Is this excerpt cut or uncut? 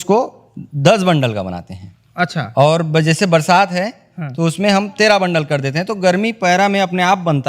uncut